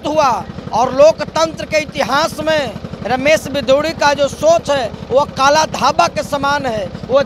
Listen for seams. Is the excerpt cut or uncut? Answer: uncut